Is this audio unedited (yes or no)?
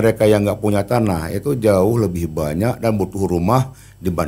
yes